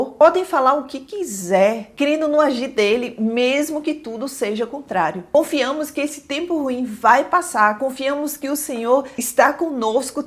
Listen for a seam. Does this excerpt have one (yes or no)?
yes